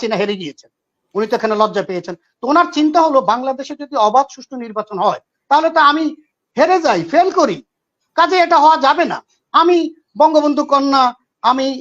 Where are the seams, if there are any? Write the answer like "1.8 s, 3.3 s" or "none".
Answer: none